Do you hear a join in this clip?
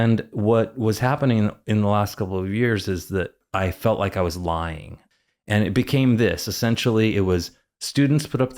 yes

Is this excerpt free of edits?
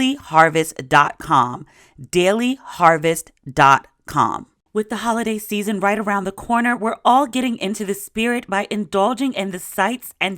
no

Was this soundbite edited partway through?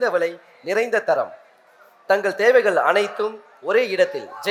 no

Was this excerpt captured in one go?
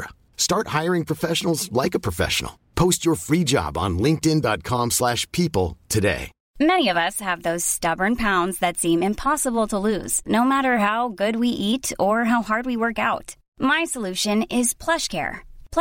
no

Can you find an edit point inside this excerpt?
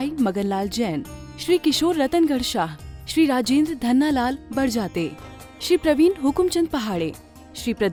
no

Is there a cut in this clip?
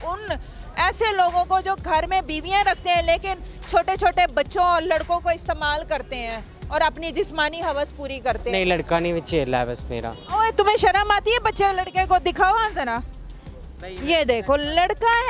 yes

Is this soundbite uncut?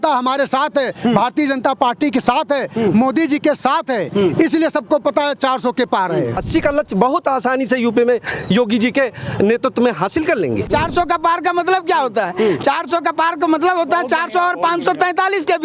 no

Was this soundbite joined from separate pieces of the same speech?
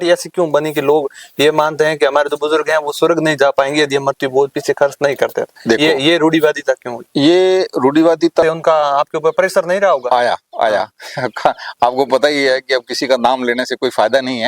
yes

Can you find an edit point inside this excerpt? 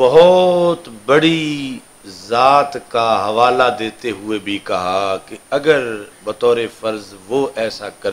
no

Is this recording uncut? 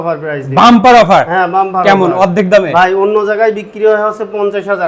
yes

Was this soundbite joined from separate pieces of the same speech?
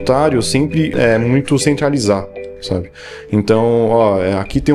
yes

